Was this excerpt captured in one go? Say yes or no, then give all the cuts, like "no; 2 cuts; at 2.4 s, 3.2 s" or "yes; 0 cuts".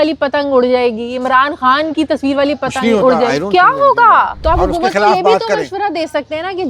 no; 1 cut; at 4.4 s